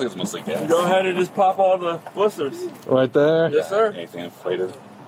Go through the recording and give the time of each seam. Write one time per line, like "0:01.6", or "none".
none